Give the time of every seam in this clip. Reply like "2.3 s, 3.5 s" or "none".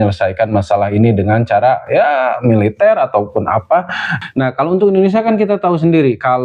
4.1 s